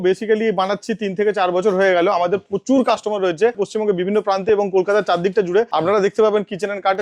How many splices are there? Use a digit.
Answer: 2